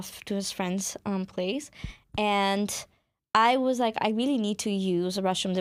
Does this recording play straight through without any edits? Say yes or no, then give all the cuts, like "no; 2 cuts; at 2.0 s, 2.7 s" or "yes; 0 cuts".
yes; 0 cuts